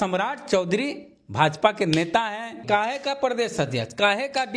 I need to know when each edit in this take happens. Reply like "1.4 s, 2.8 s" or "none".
2.6 s